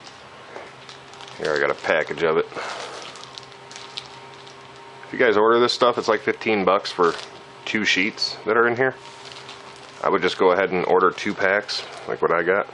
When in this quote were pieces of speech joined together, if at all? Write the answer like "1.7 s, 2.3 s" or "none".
9.1 s